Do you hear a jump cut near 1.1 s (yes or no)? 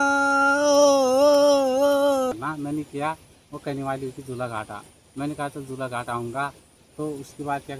no